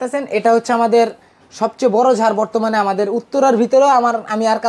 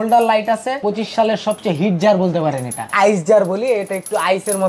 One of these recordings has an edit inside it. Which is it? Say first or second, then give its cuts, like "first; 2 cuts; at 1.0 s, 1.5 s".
second; 2 cuts; at 0.8 s, 2.9 s